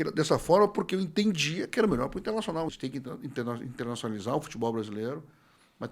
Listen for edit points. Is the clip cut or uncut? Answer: cut